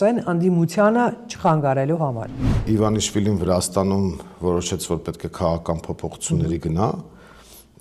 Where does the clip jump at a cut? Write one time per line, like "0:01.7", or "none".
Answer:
0:02.6